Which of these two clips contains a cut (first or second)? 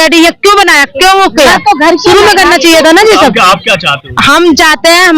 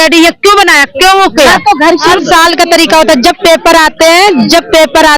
second